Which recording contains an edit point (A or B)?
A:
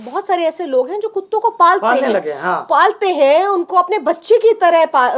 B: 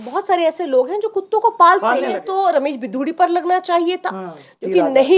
B